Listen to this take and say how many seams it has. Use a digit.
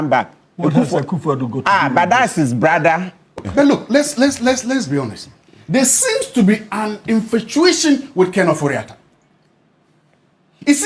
1